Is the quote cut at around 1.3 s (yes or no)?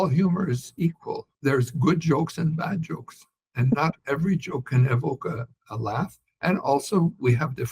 yes